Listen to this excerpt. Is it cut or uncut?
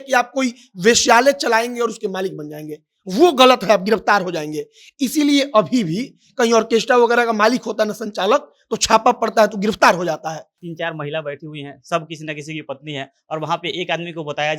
cut